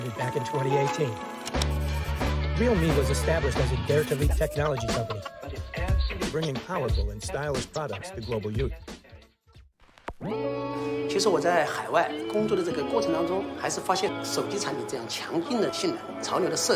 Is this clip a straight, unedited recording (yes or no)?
no